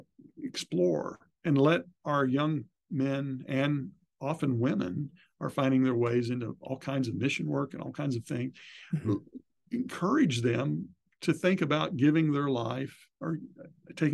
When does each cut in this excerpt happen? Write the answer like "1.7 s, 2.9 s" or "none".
1.3 s